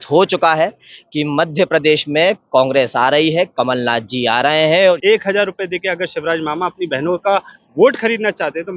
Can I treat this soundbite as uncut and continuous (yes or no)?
no